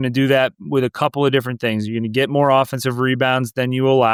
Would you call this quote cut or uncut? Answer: uncut